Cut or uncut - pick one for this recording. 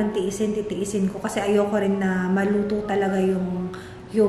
uncut